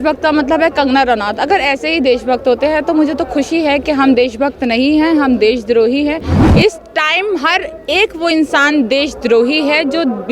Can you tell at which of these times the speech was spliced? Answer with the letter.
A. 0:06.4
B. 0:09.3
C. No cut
A